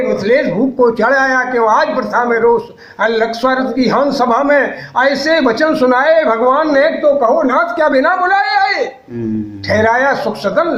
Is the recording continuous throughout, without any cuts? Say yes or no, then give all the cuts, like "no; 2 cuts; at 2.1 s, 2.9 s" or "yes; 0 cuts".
yes; 0 cuts